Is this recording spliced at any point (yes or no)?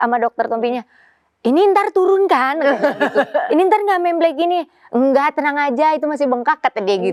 no